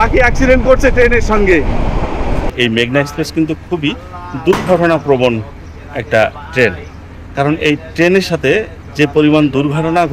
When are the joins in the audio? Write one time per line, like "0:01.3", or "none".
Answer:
0:02.5